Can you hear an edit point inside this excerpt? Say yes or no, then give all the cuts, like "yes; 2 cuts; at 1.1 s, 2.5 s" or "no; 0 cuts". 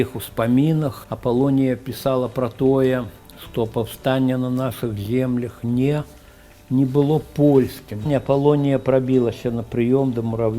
yes; 2 cuts; at 1.0 s, 8.1 s